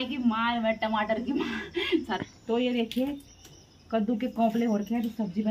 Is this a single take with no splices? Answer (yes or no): no